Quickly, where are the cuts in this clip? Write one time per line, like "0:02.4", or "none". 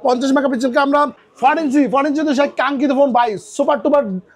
0:01.2